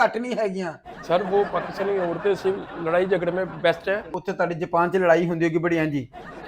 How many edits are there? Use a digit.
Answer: 1